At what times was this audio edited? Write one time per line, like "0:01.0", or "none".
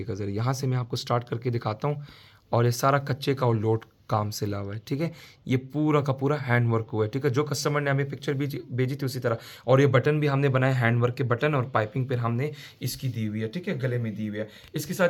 none